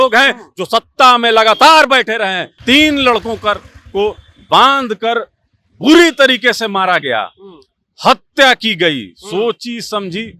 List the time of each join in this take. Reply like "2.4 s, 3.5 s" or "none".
2.5 s

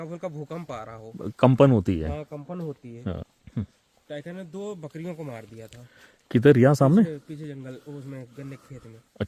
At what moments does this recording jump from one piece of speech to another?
none

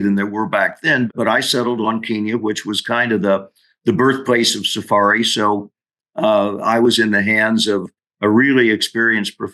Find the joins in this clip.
1.1 s

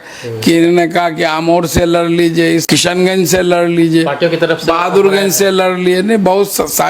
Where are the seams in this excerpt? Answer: 2.7 s

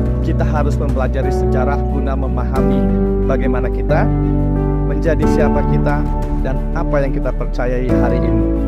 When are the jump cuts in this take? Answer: none

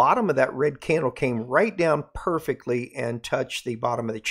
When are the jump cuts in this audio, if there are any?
none

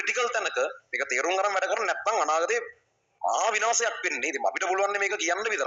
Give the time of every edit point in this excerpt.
none

